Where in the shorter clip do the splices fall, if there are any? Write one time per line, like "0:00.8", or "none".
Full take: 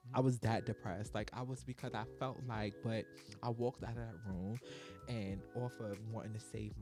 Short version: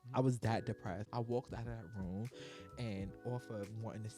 0:01.0

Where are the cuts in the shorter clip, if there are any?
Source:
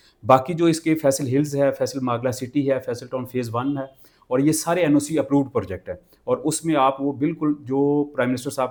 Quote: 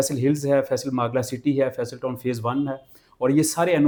none

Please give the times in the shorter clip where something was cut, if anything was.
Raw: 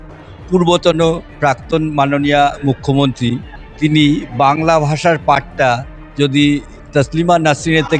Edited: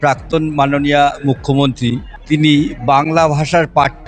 0:02.1

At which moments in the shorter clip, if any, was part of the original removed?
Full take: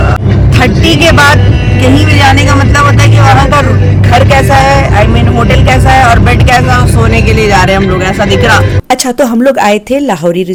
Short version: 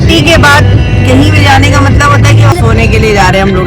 0:02.5

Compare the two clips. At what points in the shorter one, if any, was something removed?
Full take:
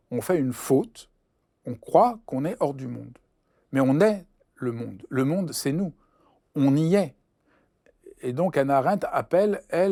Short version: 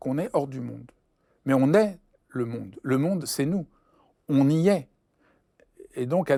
none

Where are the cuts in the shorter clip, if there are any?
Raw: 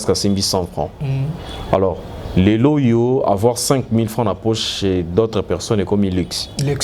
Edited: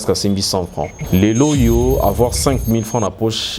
0:01.0

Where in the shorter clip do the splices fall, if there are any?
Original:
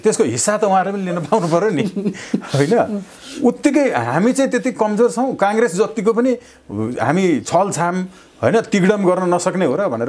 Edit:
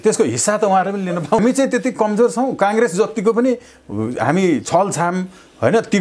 0:01.4

